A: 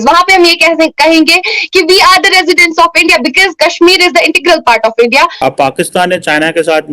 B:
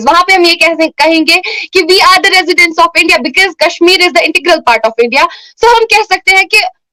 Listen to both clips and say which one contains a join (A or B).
A